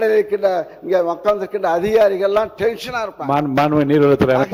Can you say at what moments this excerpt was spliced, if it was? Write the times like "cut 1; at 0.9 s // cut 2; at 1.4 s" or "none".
none